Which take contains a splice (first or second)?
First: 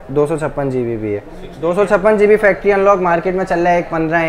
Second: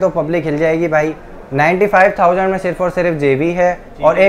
first